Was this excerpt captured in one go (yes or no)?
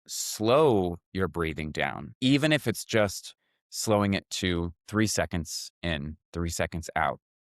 no